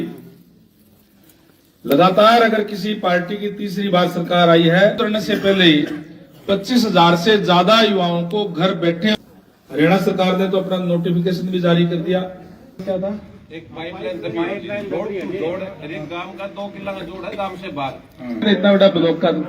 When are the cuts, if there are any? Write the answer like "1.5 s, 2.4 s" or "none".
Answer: 5.0 s, 9.2 s, 12.8 s, 18.4 s